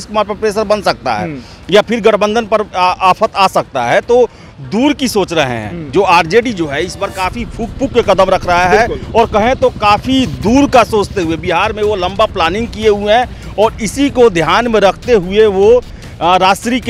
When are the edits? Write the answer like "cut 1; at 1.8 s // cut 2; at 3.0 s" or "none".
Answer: none